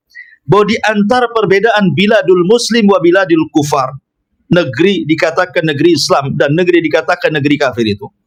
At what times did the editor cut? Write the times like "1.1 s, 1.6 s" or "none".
none